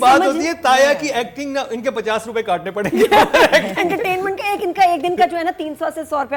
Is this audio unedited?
yes; 0 cuts

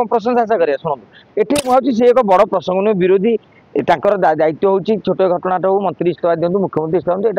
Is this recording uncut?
no; 1 cut; at 1.6 s

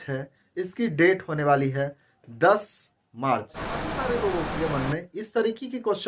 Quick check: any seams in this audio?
yes; 1 cut; at 3.9 s

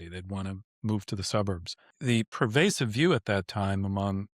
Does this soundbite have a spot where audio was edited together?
yes; 1 cut; at 2.1 s

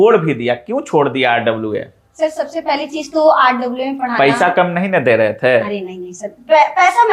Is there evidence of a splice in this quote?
no; 0 cuts

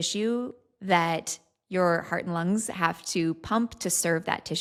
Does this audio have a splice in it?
no; 0 cuts

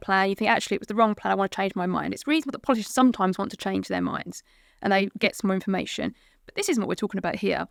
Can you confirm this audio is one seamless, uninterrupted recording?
yes; 0 cuts

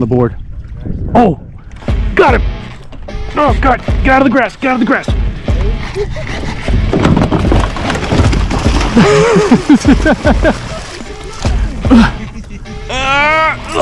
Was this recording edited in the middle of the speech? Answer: yes; 1 cut; at 6.6 s

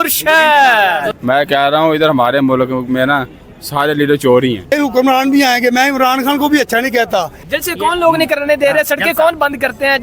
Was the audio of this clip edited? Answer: yes; 3 cuts; at 1.1 s, 4.7 s, 7.4 s

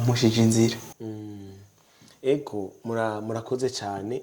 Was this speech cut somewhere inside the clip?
no; 0 cuts

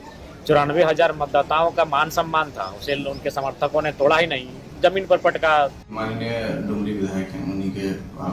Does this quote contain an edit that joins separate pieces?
yes; 1 cut; at 6.0 s

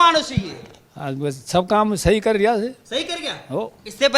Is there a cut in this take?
no; 0 cuts

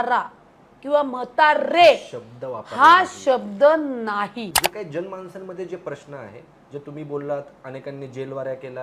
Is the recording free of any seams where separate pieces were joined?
no; 1 cut; at 4.6 s

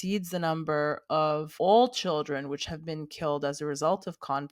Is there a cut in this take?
yes; 1 cut; at 1.5 s

